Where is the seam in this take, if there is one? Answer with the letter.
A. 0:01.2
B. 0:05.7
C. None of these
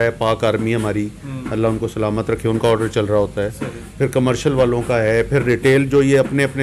C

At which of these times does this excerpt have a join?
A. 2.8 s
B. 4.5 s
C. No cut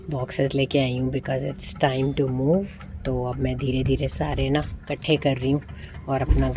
C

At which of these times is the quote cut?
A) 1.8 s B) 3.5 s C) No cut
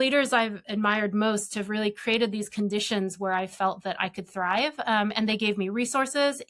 C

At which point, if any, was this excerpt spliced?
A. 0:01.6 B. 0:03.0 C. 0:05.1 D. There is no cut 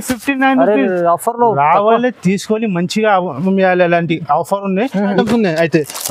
C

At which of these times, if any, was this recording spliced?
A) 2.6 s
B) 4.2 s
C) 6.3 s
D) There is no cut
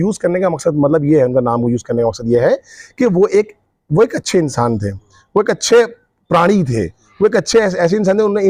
D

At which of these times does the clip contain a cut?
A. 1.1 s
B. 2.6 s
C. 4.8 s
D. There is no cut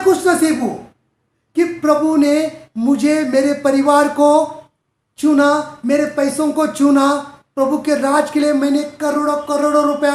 D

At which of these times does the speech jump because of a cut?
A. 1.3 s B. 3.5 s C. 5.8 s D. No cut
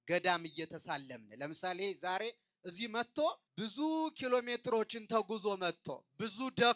B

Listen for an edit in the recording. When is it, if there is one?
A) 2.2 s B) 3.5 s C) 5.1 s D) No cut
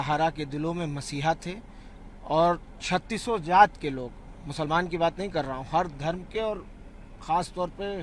D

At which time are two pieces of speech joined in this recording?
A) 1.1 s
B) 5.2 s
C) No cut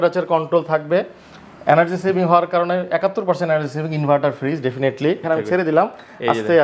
B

